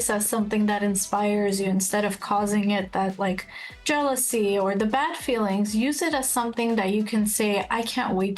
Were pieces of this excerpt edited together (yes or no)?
no